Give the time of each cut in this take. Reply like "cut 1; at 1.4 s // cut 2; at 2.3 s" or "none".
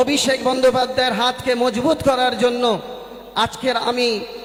none